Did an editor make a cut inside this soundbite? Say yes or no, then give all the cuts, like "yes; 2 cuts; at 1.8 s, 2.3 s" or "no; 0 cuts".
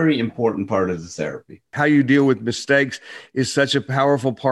yes; 1 cut; at 1.6 s